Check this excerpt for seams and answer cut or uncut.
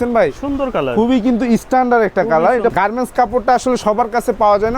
cut